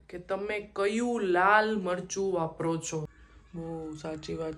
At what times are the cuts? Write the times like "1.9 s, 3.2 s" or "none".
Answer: 3.1 s